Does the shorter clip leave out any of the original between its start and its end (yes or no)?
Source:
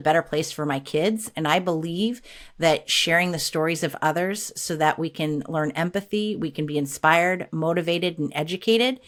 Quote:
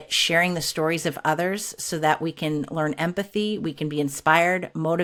no